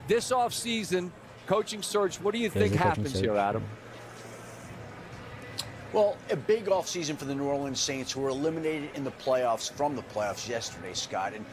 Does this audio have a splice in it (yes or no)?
no